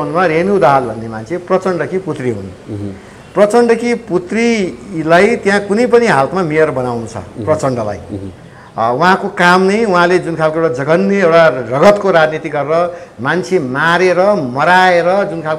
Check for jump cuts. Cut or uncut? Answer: uncut